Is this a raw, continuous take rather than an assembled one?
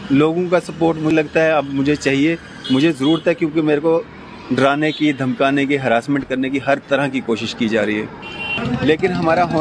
no; 2 cuts; at 1.1 s, 8.6 s

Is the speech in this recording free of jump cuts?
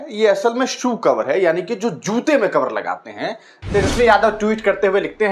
no; 1 cut; at 3.6 s

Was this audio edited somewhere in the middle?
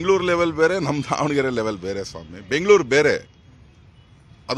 no; 0 cuts

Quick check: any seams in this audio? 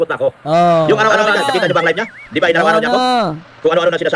yes; 1 cut; at 1.1 s

